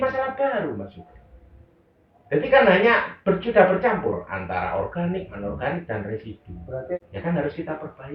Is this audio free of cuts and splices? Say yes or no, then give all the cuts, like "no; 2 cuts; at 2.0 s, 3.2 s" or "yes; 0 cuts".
no; 1 cut; at 7.0 s